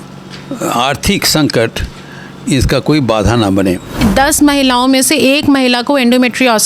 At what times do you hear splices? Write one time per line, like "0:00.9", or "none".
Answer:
0:04.0